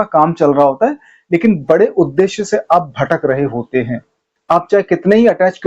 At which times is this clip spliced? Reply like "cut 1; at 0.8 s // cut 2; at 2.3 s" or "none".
cut 1; at 4.2 s